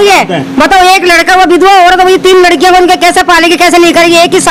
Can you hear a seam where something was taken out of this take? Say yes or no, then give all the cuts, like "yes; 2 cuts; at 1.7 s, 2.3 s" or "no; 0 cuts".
no; 0 cuts